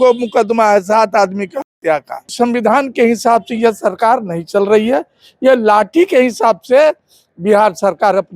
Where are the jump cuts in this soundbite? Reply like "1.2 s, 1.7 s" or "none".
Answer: 2.2 s